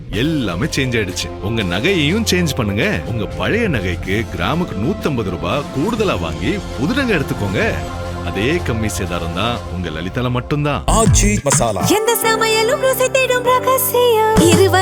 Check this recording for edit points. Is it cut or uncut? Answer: uncut